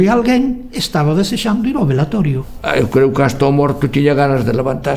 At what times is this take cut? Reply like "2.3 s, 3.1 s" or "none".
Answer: 2.4 s

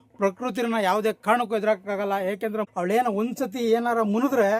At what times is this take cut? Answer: 2.7 s

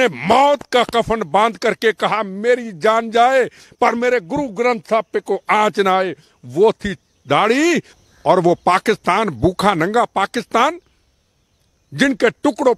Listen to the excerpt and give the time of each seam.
7.9 s

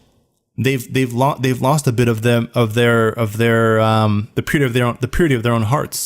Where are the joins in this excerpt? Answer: none

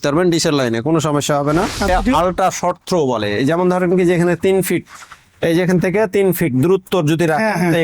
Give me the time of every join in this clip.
1.9 s

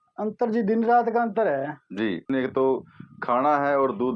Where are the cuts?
2.2 s

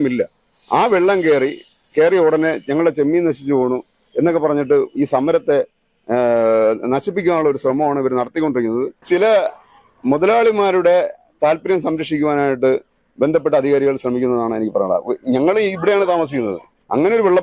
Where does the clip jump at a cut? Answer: 9.0 s

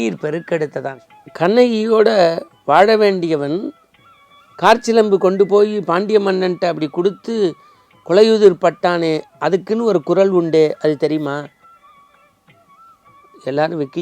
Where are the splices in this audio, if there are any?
1.0 s

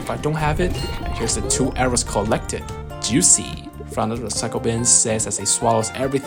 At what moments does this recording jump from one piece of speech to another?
none

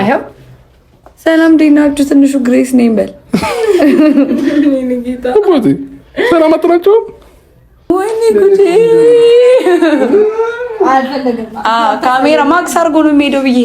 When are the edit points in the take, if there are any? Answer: 7.9 s

